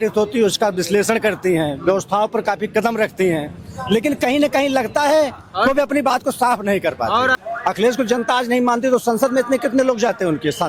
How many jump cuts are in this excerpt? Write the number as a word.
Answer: one